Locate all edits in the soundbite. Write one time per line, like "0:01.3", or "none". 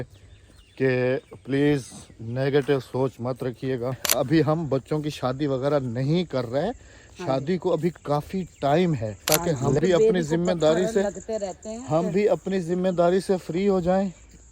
0:04.0
0:09.2